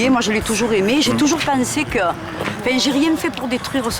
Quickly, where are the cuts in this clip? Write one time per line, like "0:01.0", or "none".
none